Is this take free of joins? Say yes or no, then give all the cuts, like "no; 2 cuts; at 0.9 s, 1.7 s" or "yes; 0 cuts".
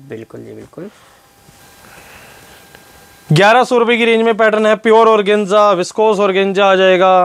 no; 1 cut; at 1.5 s